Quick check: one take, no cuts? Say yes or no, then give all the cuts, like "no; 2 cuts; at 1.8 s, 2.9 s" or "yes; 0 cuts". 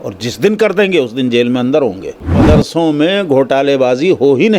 no; 1 cut; at 2.4 s